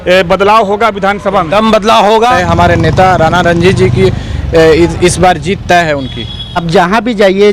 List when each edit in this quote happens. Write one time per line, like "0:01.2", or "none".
0:02.4
0:06.6